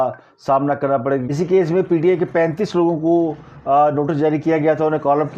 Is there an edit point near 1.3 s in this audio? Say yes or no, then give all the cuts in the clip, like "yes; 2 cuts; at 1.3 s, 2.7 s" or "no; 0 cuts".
yes; 1 cut; at 1.3 s